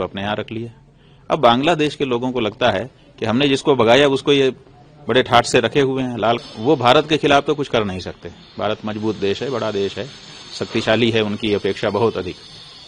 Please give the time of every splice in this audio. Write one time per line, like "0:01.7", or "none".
0:06.4